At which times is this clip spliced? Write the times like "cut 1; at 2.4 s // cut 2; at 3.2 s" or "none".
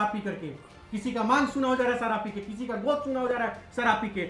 none